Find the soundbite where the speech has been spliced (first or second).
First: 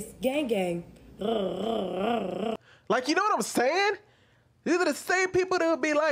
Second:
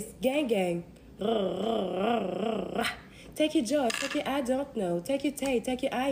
second